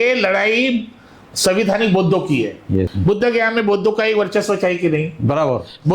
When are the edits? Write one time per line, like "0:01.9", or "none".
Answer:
0:02.9